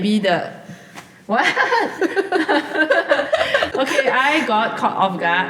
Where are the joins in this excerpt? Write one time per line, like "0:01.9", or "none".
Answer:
0:03.7